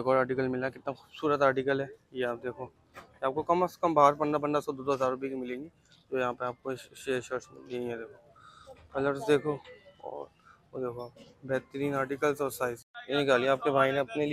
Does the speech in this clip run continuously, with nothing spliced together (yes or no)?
yes